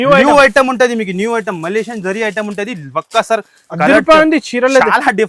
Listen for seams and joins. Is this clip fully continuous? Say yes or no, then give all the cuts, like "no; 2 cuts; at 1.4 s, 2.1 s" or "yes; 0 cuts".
yes; 0 cuts